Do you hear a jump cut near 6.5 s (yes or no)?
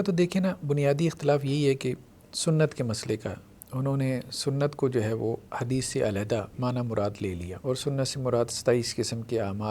yes